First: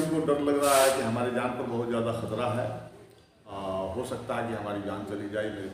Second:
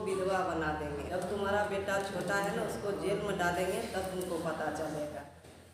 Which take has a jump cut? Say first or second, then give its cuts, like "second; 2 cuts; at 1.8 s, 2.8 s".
second; 1 cut; at 1.0 s